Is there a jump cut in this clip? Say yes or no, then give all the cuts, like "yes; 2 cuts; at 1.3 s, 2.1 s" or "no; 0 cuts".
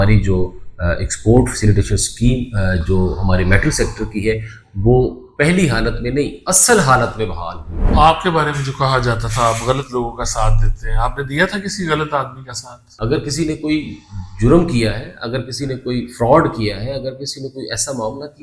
yes; 2 cuts; at 7.8 s, 12.9 s